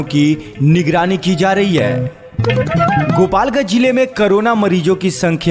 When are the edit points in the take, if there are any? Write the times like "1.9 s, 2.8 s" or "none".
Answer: 1.9 s, 3.2 s